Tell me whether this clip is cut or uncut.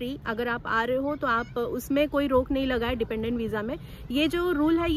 uncut